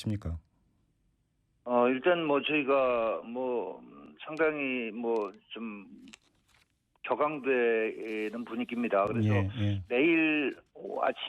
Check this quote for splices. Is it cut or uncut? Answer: cut